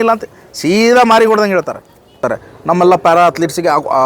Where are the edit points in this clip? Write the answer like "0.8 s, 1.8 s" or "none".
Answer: 2.2 s